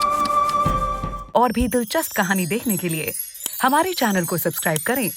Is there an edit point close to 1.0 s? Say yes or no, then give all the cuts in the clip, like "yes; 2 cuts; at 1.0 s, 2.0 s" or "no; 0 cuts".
yes; 1 cut; at 1.0 s